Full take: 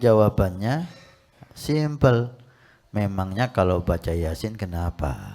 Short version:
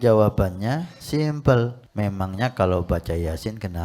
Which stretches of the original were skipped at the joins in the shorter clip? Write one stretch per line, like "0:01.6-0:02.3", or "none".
0:00.9-0:01.5
0:02.4-0:02.8